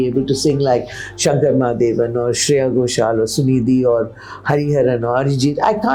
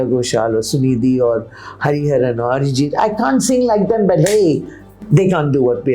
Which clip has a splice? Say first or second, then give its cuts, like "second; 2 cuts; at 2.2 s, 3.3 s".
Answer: second; 1 cut; at 5.0 s